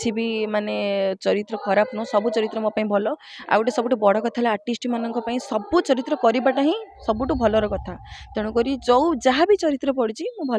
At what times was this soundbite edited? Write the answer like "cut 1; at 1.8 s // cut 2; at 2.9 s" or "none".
none